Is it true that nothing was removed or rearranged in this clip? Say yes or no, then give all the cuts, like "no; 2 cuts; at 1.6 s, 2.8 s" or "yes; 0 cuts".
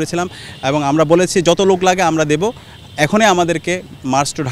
yes; 0 cuts